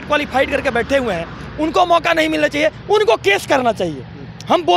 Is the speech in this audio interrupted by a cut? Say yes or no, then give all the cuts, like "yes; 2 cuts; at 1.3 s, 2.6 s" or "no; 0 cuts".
no; 0 cuts